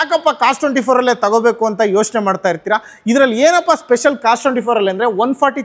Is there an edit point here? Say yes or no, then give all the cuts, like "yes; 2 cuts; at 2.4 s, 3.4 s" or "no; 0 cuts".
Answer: no; 0 cuts